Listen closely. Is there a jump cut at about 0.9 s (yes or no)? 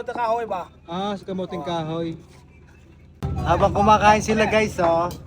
no